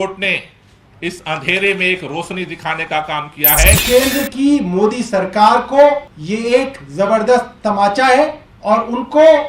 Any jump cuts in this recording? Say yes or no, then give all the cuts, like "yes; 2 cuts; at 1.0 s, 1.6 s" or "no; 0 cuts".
yes; 3 cuts; at 3.8 s, 6.1 s, 8.5 s